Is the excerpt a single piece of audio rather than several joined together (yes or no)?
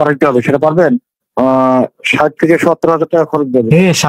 no